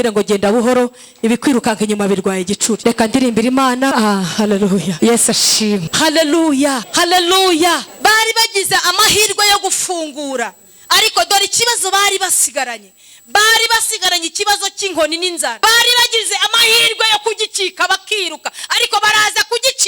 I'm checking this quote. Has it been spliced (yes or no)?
yes